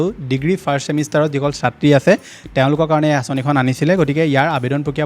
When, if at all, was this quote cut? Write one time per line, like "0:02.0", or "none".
none